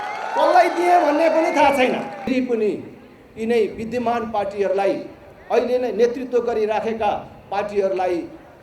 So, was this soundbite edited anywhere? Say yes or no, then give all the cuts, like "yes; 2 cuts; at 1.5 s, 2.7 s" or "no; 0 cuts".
yes; 1 cut; at 2.3 s